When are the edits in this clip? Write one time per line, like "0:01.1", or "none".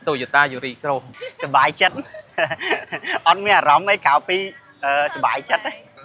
0:01.2